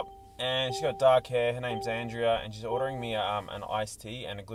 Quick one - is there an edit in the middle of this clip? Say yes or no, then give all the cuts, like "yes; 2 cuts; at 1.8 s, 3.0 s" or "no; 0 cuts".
no; 0 cuts